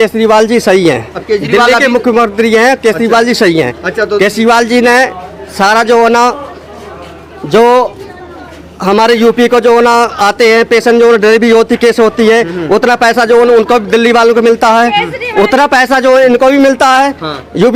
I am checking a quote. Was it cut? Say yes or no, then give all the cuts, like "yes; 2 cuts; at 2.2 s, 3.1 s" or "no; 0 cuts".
no; 0 cuts